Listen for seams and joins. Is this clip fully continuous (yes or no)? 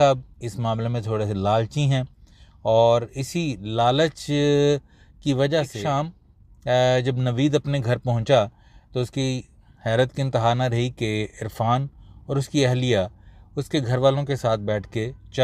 no